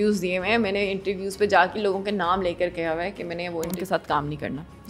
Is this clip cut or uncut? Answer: cut